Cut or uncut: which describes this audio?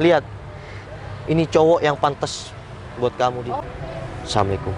cut